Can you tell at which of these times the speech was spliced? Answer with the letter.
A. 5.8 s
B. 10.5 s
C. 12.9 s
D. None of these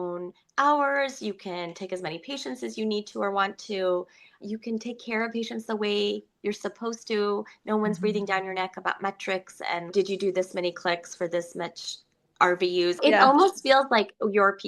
C